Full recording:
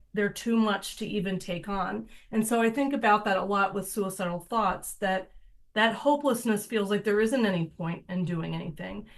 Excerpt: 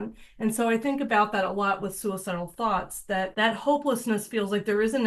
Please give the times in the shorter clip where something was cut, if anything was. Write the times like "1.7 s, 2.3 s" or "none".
3.3 s